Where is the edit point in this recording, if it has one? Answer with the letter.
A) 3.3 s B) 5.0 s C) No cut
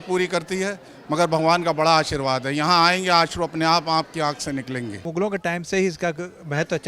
B